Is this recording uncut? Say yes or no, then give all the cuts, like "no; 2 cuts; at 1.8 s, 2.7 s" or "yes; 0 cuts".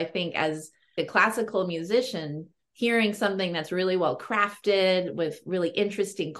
no; 1 cut; at 0.9 s